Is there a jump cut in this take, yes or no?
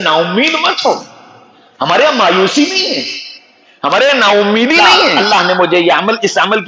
yes